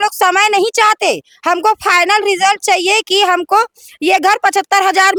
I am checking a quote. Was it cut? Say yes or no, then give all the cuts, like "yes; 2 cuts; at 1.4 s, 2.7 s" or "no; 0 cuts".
no; 0 cuts